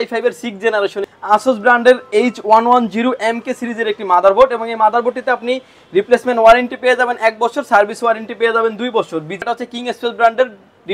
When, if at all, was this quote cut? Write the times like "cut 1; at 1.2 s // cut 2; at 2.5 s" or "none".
cut 1; at 1.1 s // cut 2; at 9.4 s